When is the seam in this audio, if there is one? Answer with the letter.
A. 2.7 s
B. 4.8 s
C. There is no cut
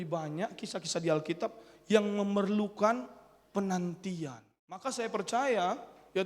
B